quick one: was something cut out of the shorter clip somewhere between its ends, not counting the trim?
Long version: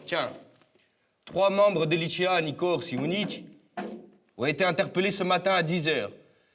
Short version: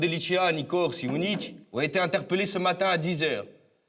yes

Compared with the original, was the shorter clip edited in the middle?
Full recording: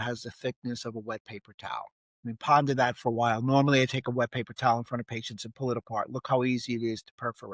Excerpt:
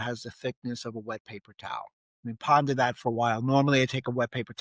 no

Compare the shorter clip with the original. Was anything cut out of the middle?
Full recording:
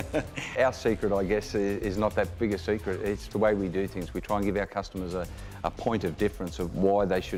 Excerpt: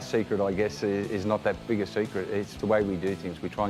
no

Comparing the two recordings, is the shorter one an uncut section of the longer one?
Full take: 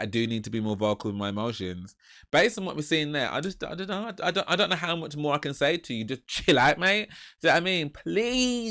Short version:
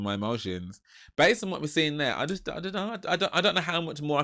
yes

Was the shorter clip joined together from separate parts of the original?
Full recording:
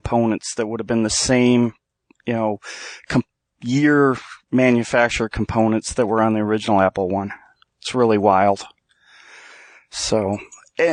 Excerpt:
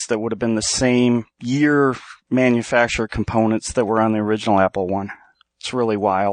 yes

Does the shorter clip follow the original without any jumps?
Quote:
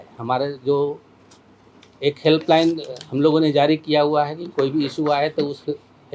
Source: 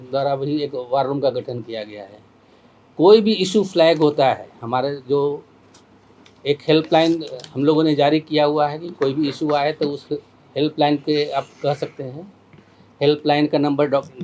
yes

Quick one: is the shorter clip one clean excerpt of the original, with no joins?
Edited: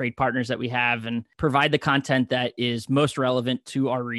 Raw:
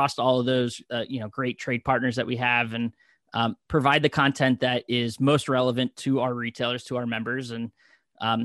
no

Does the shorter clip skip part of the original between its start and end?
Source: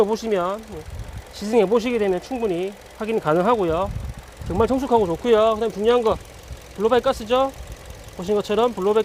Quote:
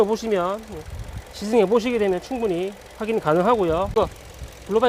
yes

